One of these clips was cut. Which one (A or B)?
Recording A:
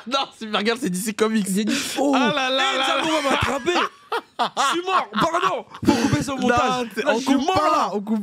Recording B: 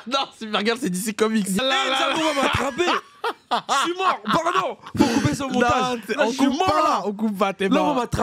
B